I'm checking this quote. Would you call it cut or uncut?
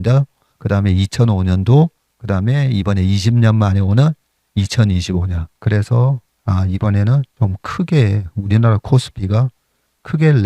cut